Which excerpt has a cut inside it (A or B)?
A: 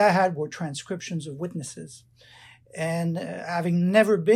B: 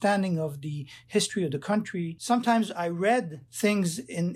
B